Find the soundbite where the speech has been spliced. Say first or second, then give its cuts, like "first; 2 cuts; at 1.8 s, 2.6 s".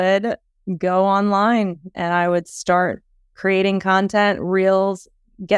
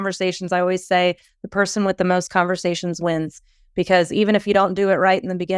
first; 1 cut; at 3.3 s